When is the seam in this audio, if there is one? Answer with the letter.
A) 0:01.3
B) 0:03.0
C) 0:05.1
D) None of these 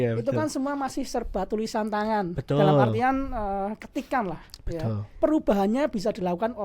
C